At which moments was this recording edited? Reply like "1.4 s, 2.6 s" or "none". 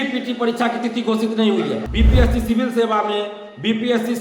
1.9 s